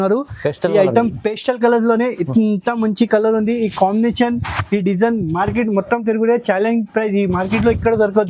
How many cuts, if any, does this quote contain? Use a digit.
0